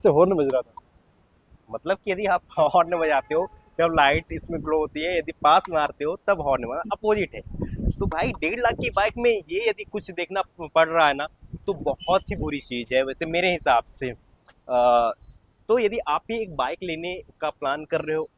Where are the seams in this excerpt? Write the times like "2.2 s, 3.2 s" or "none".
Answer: none